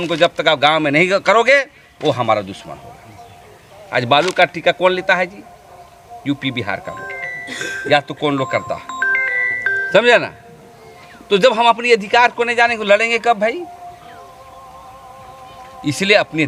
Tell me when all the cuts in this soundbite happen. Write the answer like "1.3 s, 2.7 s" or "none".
none